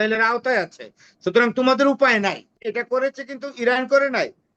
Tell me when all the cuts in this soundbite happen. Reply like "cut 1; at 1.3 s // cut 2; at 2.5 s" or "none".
cut 1; at 2.6 s